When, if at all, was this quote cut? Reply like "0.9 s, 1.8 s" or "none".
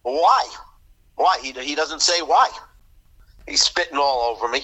3.1 s